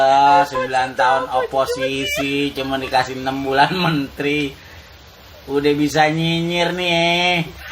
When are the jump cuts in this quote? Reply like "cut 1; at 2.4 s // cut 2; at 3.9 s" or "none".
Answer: none

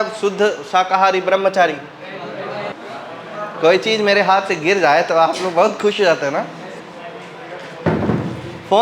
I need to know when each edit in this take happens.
cut 1; at 2.7 s // cut 2; at 6.8 s

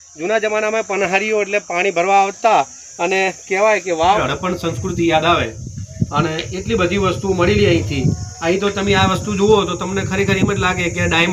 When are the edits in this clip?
cut 1; at 4.2 s

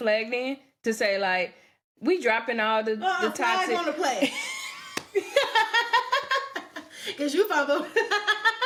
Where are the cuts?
none

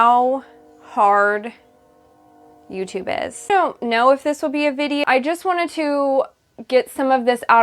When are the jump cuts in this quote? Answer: cut 1; at 3.5 s // cut 2; at 5.0 s

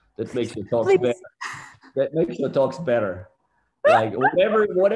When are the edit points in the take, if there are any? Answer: none

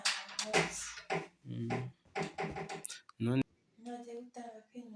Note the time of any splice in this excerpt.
cut 1; at 3.4 s

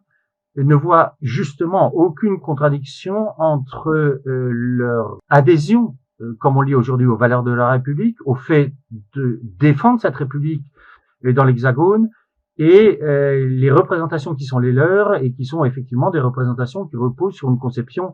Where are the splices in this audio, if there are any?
cut 1; at 5.2 s

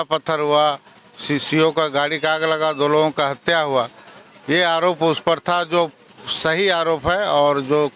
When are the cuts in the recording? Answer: none

